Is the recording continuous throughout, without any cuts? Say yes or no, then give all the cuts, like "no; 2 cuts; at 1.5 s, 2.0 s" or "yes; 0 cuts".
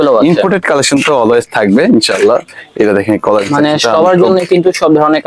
yes; 0 cuts